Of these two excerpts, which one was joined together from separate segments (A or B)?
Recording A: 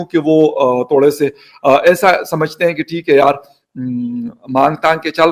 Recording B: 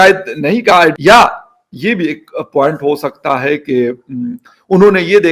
B